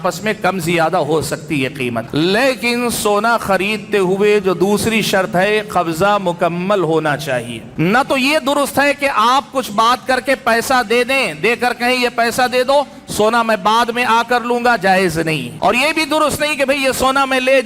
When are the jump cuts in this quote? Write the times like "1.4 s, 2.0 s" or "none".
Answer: 2.1 s, 7.6 s, 15.5 s